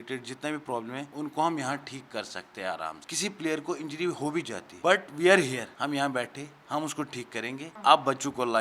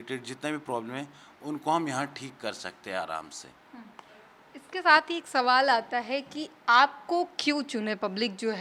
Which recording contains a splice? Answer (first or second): first